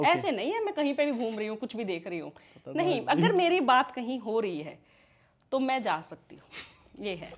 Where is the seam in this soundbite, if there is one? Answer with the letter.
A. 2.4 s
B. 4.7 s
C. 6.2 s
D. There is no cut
D